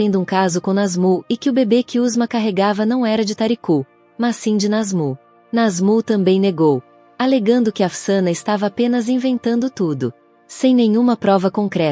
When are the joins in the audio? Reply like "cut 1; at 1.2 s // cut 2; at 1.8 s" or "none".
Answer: cut 1; at 5.3 s

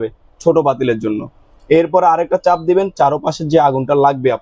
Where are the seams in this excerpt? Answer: none

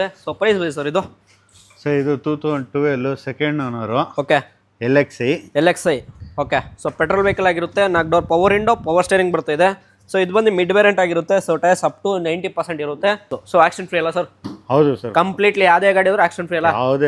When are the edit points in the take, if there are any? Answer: cut 1; at 13.4 s

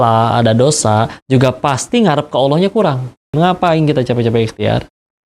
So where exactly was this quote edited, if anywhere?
cut 1; at 3.3 s

